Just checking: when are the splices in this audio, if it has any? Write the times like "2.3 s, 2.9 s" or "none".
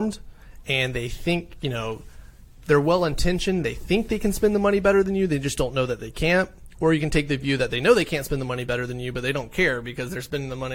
none